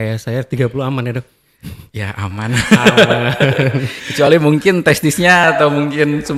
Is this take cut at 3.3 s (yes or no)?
no